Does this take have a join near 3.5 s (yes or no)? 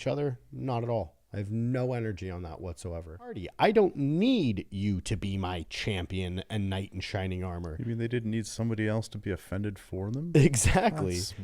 yes